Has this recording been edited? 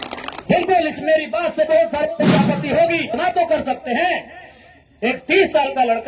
yes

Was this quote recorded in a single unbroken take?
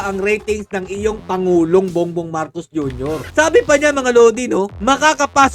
no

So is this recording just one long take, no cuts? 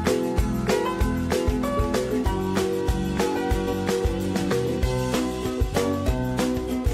yes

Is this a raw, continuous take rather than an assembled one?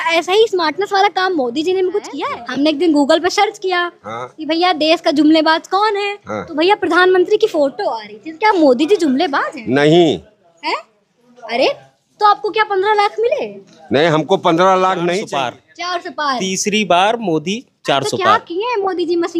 no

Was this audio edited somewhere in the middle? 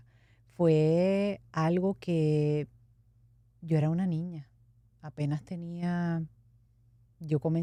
no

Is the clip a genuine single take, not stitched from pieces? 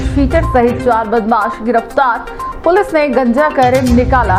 yes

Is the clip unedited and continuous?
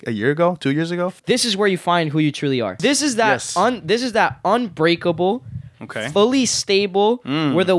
no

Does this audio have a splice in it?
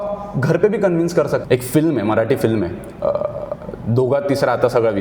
yes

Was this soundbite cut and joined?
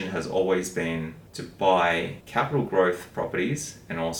yes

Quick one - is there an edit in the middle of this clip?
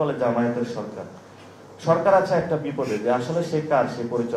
no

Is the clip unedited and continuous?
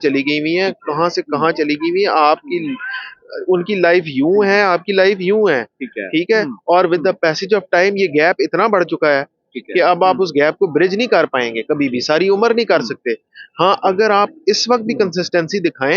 yes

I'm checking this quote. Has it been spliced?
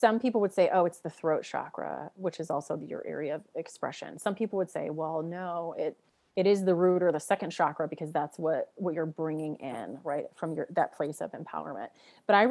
no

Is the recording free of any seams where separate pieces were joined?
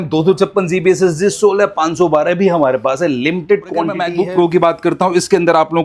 no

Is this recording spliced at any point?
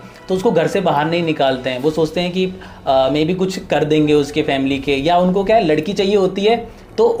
no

